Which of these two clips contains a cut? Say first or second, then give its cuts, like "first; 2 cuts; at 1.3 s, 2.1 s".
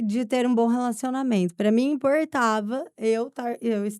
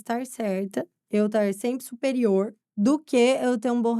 second; 2 cuts; at 1.0 s, 2.6 s